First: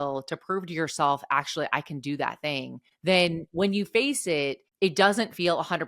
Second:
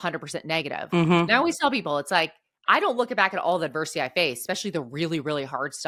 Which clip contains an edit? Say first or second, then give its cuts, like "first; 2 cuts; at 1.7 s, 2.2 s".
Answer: first; 2 cuts; at 2.9 s, 4.6 s